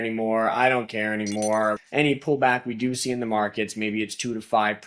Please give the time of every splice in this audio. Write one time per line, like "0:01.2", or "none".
0:01.8